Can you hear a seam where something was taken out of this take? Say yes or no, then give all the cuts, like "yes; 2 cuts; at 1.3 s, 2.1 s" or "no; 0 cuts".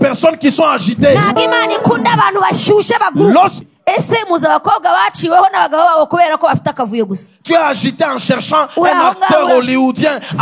yes; 1 cut; at 3.6 s